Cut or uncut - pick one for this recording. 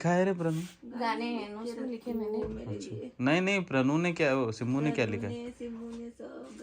uncut